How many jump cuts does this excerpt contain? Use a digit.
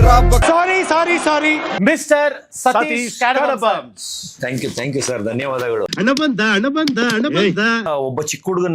2